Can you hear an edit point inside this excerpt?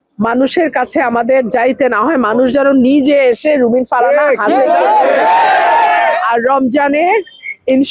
yes; 1 cut; at 6.2 s

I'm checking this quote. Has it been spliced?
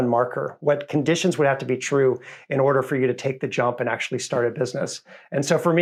no; 0 cuts

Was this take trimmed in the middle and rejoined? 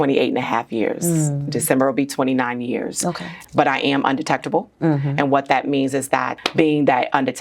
yes; 2 cuts; at 3.3 s, 6.4 s

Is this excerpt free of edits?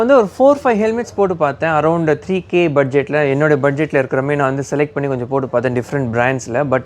yes; 0 cuts

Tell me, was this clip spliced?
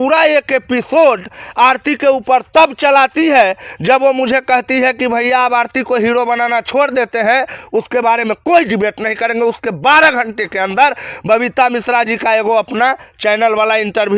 no; 0 cuts

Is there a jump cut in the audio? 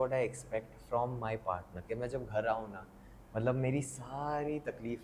no; 0 cuts

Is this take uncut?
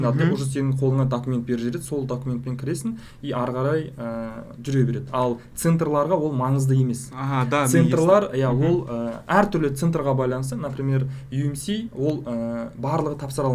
yes; 0 cuts

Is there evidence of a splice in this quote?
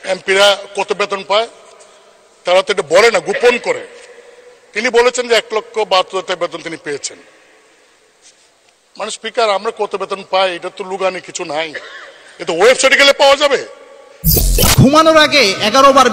no; 0 cuts

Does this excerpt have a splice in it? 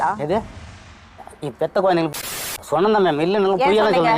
yes; 1 cut; at 2.1 s

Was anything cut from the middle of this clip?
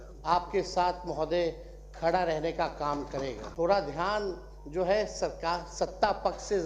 yes; 1 cut; at 3.4 s

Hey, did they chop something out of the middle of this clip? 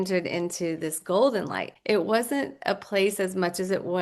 yes; 1 cut; at 1.7 s

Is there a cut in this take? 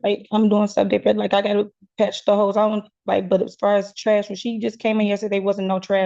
no; 0 cuts

